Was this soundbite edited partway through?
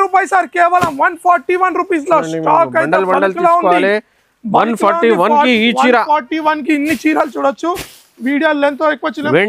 no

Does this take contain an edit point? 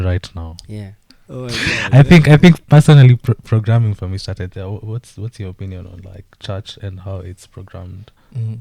yes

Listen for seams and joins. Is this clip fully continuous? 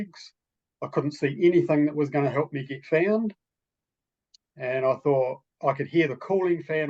yes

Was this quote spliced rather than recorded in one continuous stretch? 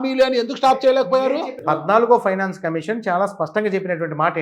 yes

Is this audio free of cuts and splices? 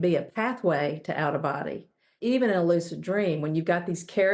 no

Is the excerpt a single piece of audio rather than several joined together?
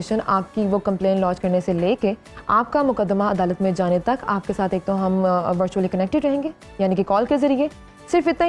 yes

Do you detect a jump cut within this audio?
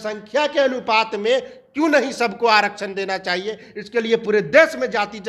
no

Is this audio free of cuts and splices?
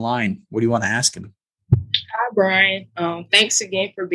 yes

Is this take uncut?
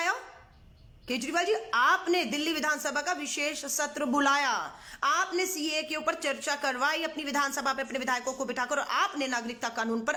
yes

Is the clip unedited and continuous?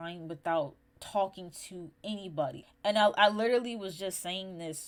yes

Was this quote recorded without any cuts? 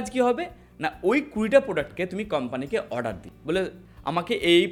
yes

